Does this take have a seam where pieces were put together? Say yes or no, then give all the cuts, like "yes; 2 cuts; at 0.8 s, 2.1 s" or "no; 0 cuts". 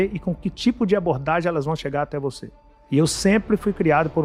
no; 0 cuts